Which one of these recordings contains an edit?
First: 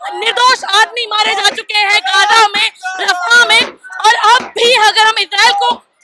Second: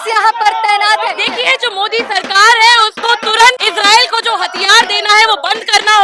second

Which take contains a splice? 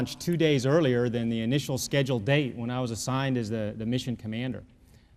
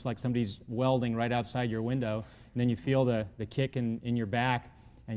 second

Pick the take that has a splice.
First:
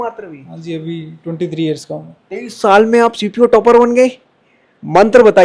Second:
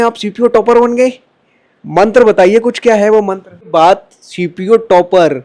second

